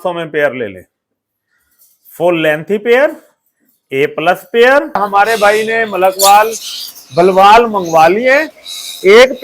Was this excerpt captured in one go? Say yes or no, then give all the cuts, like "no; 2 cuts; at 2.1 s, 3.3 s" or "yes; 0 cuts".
no; 1 cut; at 5.0 s